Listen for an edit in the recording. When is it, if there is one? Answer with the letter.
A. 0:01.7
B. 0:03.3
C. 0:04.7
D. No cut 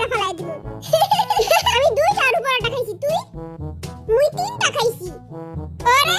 A